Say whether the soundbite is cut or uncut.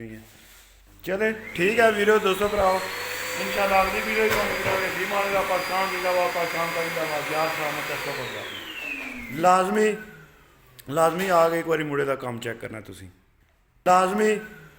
cut